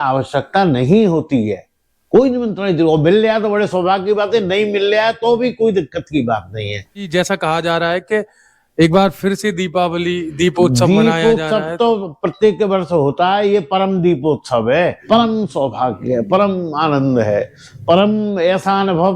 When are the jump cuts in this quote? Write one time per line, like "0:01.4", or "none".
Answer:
0:07.1
0:15.0

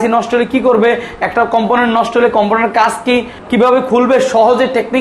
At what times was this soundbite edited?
0:03.4

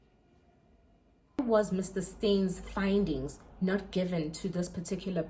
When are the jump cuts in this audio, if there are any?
0:01.4

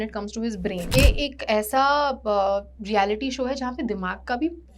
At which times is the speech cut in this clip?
0:00.9

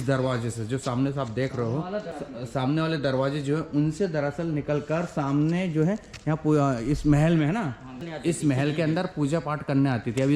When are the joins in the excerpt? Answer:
0:02.1
0:08.0

